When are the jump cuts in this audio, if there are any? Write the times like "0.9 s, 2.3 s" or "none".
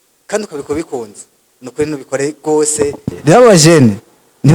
3.1 s